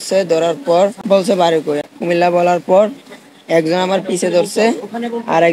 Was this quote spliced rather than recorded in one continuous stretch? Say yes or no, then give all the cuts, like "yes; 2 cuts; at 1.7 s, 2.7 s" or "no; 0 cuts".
yes; 2 cuts; at 1.0 s, 1.9 s